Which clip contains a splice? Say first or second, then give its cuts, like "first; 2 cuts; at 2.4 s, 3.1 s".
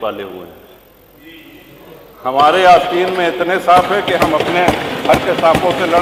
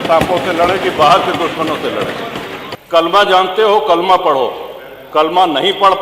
second; 1 cut; at 2.7 s